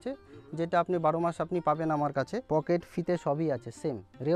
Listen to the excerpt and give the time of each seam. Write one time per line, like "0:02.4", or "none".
0:02.4